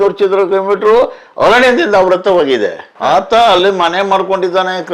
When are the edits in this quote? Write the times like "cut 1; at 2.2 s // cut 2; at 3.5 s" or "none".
cut 1; at 2.9 s